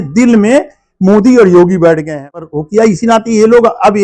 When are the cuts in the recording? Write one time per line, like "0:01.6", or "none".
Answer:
0:02.4